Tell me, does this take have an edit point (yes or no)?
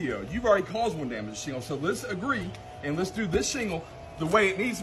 no